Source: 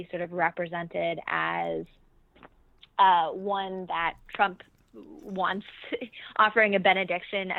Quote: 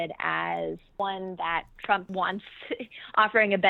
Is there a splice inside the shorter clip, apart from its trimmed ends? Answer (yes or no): yes